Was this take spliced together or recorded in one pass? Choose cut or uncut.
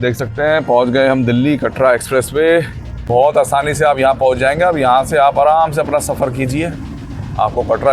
cut